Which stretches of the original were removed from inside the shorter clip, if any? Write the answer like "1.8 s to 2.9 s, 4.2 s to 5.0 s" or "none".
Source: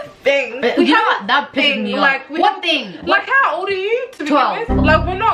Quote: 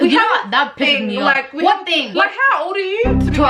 2.8 s to 3.0 s